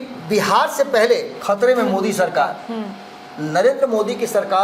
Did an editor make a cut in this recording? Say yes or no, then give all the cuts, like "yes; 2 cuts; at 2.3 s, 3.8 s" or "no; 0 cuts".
no; 0 cuts